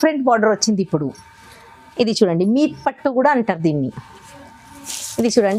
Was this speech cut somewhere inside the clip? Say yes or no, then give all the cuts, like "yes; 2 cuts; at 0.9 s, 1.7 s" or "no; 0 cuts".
no; 0 cuts